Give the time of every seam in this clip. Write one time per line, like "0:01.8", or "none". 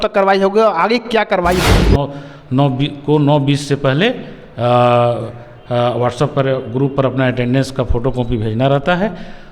0:01.9